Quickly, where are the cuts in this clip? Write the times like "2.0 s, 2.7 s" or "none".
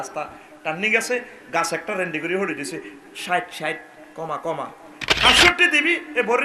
none